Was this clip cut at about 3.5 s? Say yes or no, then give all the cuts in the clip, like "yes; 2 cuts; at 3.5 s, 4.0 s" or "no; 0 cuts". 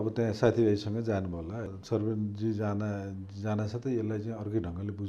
no; 1 cut; at 1.7 s